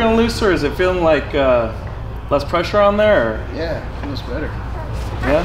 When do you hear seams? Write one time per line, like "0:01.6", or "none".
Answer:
none